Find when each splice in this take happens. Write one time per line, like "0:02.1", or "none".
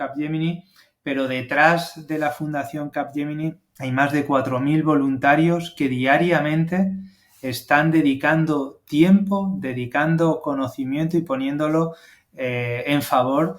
0:03.7